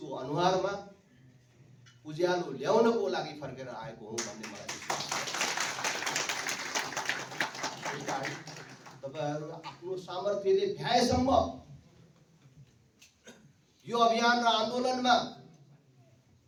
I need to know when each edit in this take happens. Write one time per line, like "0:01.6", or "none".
none